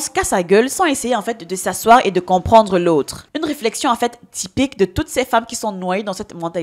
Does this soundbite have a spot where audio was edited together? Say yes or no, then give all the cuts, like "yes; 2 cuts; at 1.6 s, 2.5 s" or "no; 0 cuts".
yes; 1 cut; at 3.2 s